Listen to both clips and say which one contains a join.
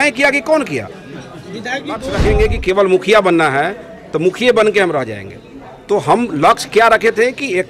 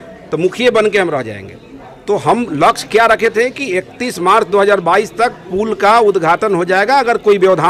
first; 1 cut; at 2.1 s

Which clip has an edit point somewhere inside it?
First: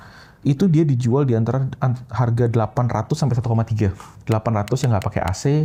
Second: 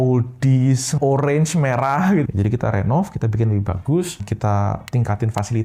second; 3 cuts; at 0.9 s, 2.2 s, 4.5 s

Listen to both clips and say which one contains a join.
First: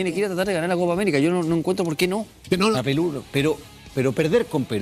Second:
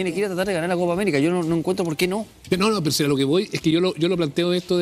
first; 1 cut; at 2.8 s

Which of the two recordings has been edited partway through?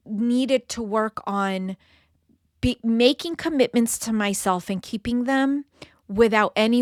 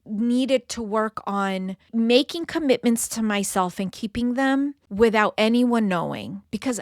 second; 2 cuts; at 1.9 s, 4.8 s

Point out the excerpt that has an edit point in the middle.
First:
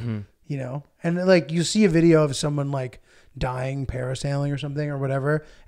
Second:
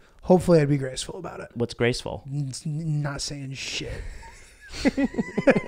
second; 1 cut; at 1.5 s

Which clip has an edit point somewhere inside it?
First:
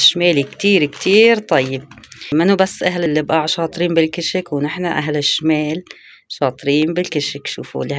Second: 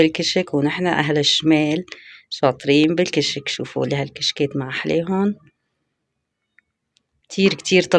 first; 2 cuts; at 2.3 s, 3.1 s

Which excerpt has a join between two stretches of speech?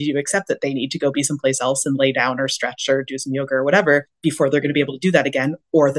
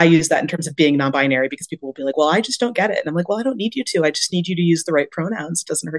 first; 1 cut; at 4.1 s

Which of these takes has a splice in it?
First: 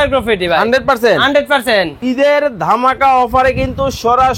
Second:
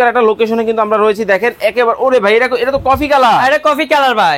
first; 1 cut; at 2.0 s

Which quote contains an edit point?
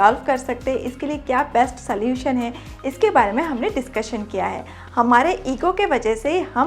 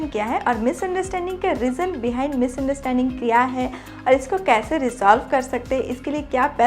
first; 1 cut; at 4.8 s

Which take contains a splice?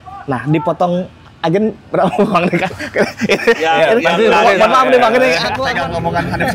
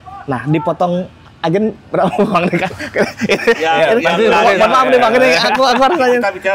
first; 1 cut; at 5.6 s

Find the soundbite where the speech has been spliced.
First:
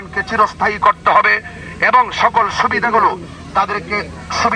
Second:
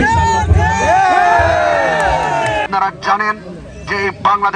second; 1 cut; at 2.7 s

